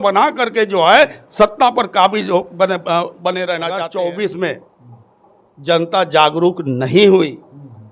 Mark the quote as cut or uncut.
cut